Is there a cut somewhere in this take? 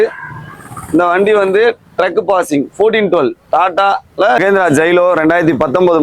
yes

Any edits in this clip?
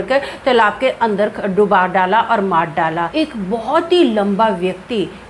yes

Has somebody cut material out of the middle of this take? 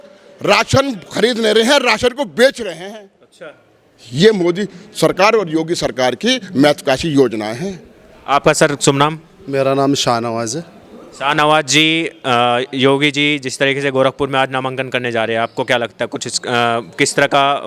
no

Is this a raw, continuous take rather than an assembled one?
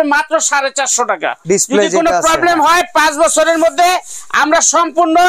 no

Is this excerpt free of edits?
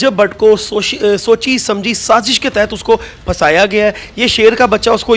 yes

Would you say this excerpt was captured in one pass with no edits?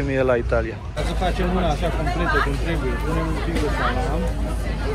no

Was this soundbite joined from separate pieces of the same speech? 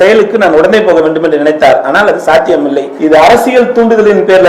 yes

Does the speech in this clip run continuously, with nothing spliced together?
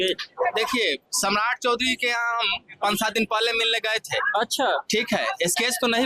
yes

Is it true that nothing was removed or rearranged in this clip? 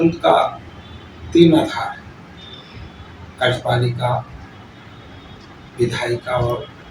yes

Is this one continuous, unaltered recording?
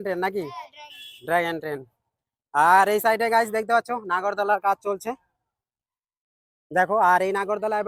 yes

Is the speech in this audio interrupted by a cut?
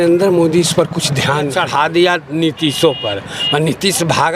yes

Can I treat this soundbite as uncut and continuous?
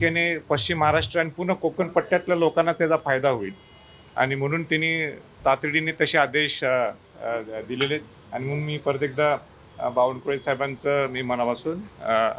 yes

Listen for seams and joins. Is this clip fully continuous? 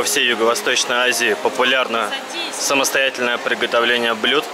yes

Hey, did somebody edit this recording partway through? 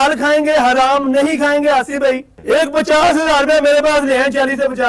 yes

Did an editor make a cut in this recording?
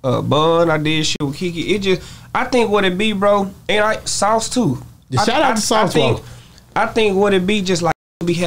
no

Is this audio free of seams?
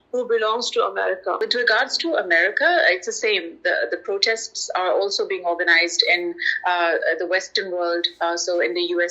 no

